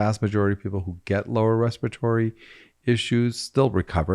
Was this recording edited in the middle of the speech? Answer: no; 0 cuts

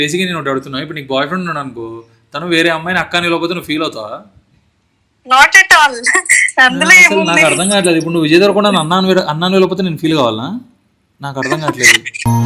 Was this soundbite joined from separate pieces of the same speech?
no; 0 cuts

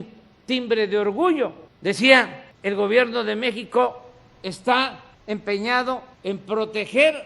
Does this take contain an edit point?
yes; 4 cuts; at 1.7 s, 2.4 s, 5.1 s, 6.1 s

